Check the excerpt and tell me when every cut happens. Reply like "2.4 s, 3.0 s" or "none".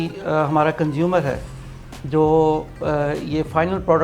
none

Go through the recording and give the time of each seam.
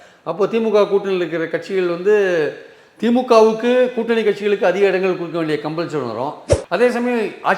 6.5 s

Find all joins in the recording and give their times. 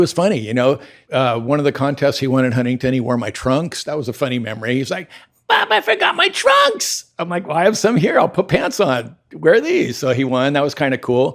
1.0 s

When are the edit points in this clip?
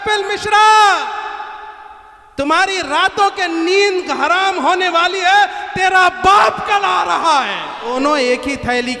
7.9 s

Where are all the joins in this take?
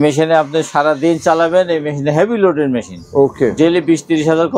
none

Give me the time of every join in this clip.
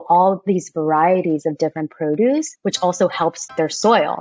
2.5 s

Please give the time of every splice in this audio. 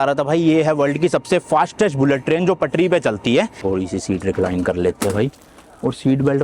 3.6 s

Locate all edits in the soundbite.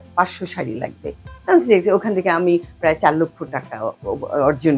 none

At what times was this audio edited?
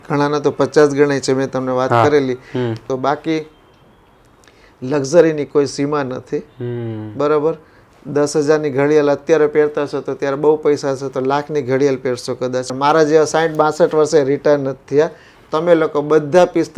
2.8 s, 12.7 s

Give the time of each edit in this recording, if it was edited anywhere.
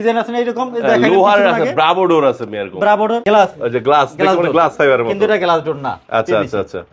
3.2 s

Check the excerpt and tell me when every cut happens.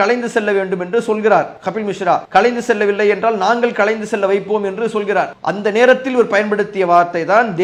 none

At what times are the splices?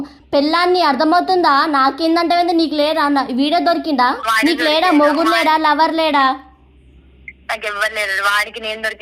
4.2 s

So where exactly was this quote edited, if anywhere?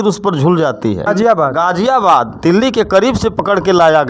1.1 s

